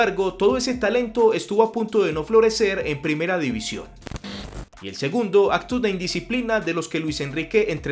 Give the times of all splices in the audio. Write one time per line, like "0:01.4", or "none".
0:04.3